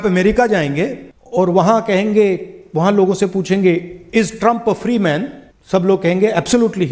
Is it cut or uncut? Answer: uncut